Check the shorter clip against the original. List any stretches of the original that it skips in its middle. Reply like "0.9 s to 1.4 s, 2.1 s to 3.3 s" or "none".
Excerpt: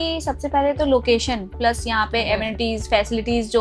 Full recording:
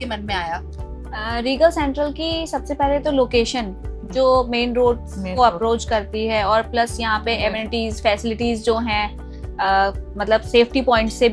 3.8 s to 6.7 s